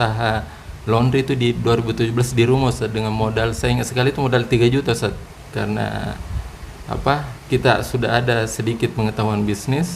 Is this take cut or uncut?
cut